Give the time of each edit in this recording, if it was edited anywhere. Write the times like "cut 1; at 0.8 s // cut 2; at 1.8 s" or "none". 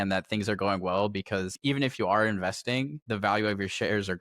cut 1; at 1.5 s // cut 2; at 3.0 s